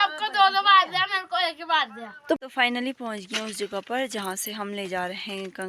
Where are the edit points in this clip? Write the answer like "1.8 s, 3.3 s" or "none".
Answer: 2.4 s